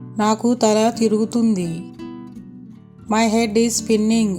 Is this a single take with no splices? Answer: yes; 0 cuts

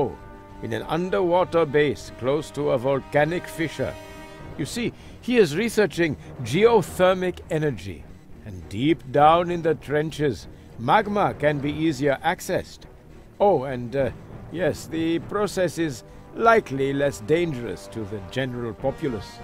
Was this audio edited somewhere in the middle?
yes; 1 cut; at 7.3 s

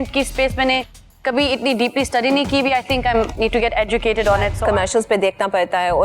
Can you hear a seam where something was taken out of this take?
yes; 1 cut; at 4.5 s

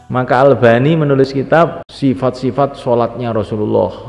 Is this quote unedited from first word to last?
no; 1 cut; at 1.3 s

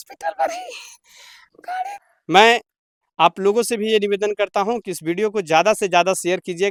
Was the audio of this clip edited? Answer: no; 0 cuts

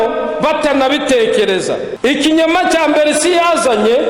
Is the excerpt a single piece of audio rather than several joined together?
no; 1 cut; at 1.9 s

